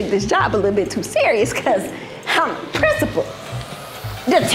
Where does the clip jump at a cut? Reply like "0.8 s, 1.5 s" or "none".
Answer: none